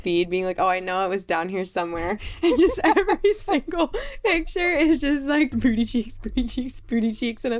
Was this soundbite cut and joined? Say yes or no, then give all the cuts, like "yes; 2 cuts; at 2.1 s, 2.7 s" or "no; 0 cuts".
yes; 1 cut; at 5.5 s